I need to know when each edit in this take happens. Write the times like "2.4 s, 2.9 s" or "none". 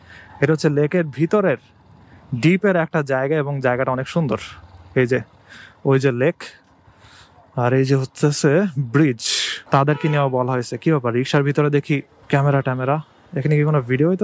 9.6 s